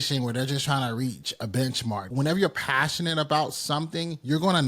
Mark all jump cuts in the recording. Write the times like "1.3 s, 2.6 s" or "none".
2.1 s